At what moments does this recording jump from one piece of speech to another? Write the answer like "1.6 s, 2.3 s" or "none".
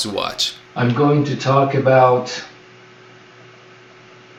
none